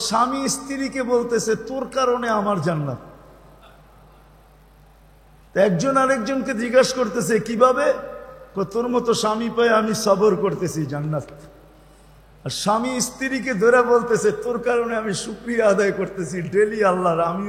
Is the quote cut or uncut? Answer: uncut